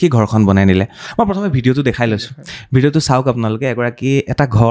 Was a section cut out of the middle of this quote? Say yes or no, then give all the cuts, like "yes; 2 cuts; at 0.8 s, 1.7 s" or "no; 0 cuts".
no; 0 cuts